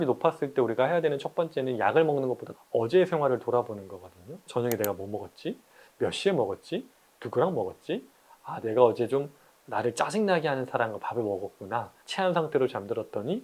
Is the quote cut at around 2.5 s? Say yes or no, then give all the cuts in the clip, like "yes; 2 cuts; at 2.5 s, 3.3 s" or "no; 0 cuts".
yes; 3 cuts; at 2.5 s, 4.5 s, 12.0 s